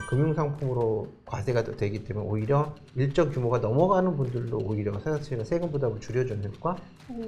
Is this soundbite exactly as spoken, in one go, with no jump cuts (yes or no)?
yes